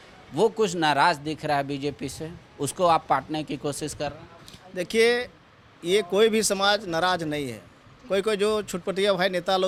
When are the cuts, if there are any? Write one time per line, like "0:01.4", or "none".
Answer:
none

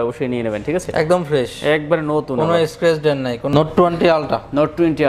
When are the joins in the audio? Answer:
0:03.5

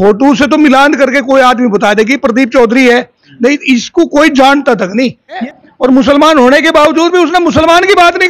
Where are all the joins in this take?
0:05.5

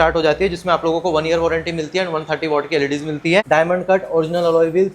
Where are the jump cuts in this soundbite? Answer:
0:03.4

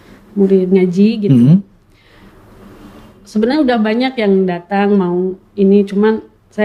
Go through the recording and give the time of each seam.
none

